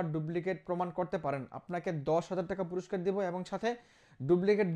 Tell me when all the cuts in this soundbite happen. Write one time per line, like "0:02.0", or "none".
none